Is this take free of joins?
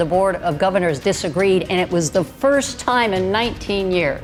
yes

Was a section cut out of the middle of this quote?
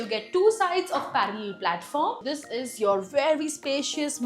yes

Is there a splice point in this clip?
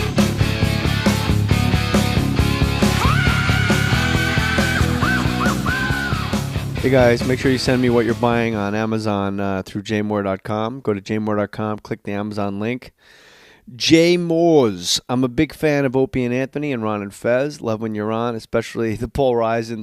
yes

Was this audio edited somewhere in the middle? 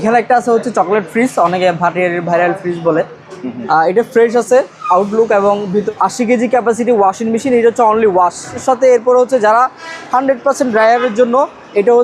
yes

